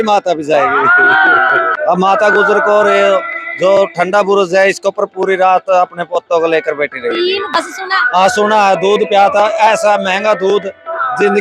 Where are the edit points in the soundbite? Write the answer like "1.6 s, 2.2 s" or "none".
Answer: 1.8 s, 7.5 s